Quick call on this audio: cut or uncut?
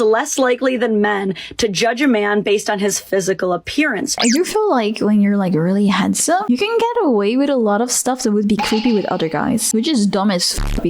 cut